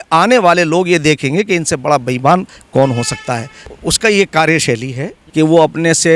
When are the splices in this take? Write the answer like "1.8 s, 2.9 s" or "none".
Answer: 3.7 s, 5.2 s